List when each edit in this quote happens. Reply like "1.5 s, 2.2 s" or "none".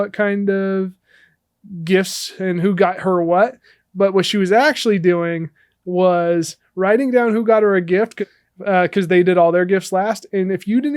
8.1 s